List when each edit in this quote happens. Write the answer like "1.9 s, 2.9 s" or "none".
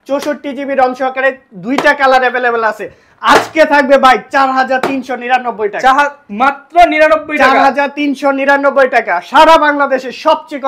none